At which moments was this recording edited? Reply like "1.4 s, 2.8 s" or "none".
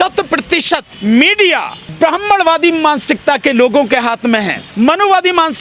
0.9 s, 1.8 s, 4.6 s